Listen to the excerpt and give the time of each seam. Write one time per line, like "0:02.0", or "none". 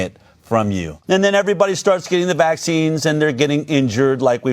0:00.9